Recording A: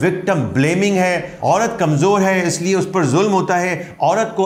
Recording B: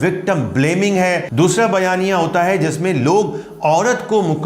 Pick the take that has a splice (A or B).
B